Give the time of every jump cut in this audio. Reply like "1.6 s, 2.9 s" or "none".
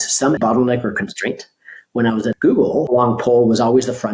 2.4 s